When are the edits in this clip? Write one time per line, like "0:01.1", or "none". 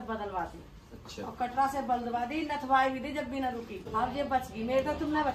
0:03.9